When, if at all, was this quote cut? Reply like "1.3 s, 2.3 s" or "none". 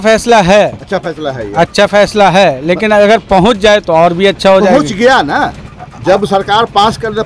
none